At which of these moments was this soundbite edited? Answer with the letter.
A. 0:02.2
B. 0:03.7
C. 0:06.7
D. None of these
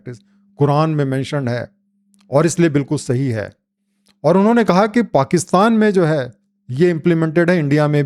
D